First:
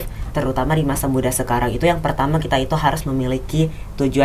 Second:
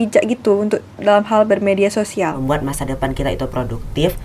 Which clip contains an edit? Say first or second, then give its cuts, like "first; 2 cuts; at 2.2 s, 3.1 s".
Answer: second; 1 cut; at 2.4 s